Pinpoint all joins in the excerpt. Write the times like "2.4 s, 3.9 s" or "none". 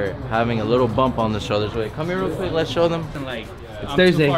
3.2 s